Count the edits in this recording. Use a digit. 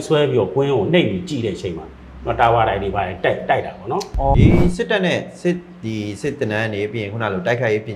1